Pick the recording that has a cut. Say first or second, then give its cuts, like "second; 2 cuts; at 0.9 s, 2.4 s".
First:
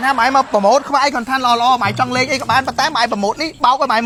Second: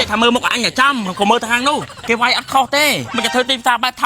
second; 2 cuts; at 1.9 s, 3.1 s